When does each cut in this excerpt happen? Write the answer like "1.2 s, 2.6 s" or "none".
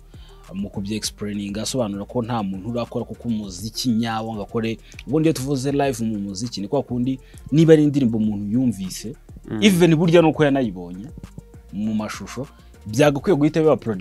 none